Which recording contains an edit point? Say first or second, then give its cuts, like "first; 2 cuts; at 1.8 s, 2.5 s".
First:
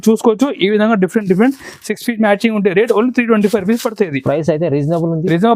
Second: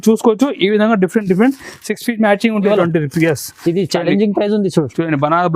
second; 1 cut; at 2.7 s